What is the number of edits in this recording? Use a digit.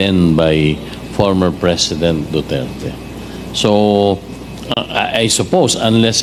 0